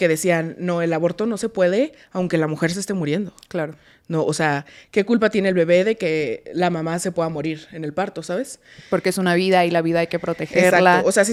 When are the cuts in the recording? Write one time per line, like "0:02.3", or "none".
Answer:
none